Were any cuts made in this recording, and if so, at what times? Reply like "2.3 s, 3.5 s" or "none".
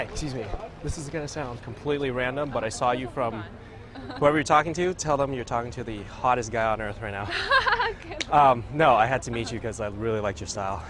8.1 s